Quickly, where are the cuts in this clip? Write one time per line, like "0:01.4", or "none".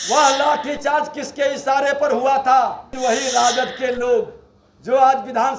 0:02.9